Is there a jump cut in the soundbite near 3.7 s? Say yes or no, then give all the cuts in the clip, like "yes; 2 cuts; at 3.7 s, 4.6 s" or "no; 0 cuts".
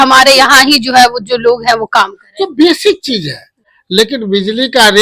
yes; 1 cut; at 3.7 s